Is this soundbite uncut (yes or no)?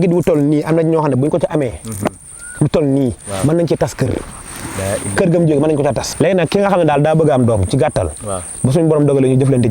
no